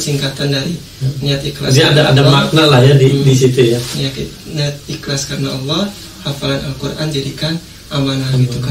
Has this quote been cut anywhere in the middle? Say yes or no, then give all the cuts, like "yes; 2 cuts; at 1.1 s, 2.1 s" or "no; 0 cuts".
no; 0 cuts